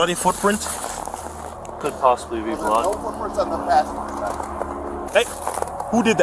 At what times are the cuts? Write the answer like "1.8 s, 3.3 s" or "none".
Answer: 1.8 s, 5.1 s